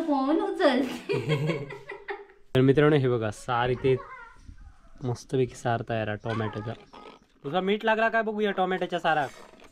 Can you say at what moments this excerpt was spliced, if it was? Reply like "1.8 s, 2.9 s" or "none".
2.3 s